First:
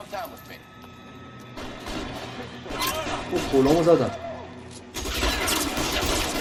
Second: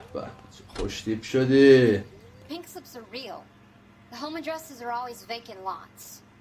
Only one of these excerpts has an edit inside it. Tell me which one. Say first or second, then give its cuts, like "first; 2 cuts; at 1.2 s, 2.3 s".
second; 1 cut; at 2.5 s